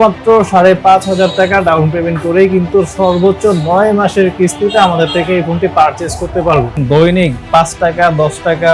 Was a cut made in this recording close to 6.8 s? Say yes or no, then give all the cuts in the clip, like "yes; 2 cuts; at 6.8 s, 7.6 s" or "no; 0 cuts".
yes; 1 cut; at 6.8 s